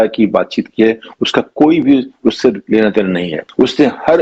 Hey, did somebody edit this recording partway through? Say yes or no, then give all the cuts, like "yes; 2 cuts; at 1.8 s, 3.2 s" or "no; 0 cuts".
no; 0 cuts